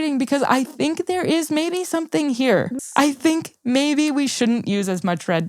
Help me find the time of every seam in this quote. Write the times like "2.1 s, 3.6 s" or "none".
2.8 s